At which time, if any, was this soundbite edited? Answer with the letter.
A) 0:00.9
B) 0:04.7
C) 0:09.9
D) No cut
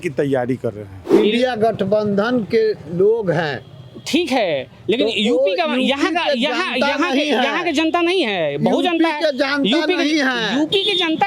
A